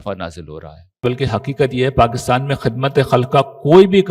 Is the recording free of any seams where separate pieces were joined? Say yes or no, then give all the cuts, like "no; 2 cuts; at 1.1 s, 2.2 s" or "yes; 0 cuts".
no; 1 cut; at 1.0 s